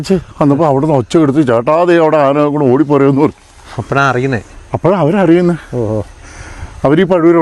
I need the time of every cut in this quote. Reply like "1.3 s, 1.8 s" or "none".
none